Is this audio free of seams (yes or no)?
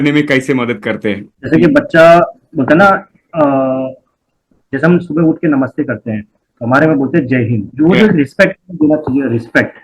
no